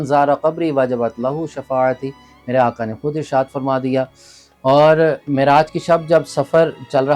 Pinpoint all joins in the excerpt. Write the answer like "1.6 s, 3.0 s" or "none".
none